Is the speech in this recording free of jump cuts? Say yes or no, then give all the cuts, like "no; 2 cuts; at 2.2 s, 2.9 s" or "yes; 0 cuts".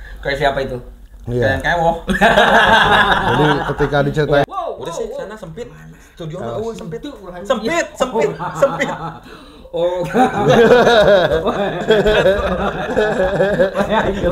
no; 1 cut; at 4.5 s